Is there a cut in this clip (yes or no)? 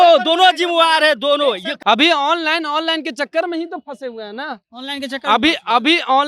yes